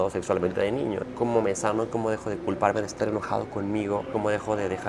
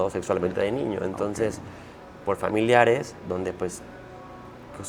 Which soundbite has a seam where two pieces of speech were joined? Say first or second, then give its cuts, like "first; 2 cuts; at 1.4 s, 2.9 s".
first; 2 cuts; at 1.0 s, 4.1 s